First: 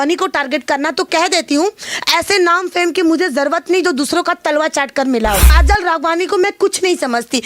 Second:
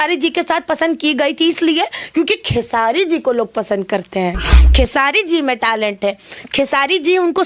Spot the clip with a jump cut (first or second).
first